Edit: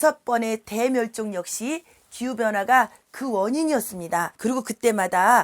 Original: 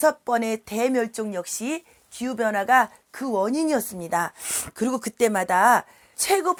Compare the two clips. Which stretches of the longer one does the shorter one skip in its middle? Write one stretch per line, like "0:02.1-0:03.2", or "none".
0:04.3-0:04.7